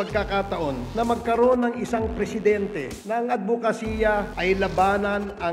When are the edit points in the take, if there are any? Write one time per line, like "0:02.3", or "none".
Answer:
none